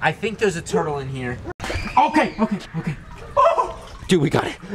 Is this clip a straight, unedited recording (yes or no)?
no